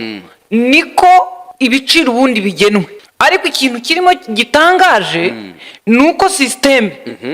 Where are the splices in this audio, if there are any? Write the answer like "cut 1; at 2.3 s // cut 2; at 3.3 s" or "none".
cut 1; at 1.4 s // cut 2; at 3.0 s